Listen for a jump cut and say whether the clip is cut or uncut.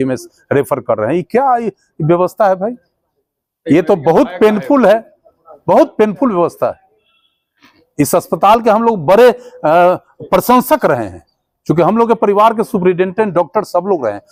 uncut